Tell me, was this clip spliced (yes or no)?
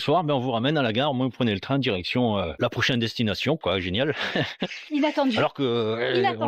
yes